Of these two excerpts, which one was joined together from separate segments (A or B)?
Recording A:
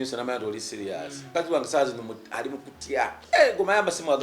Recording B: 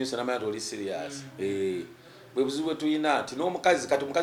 A